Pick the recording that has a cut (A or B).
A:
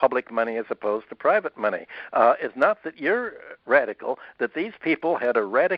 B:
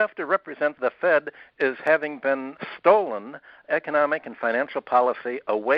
B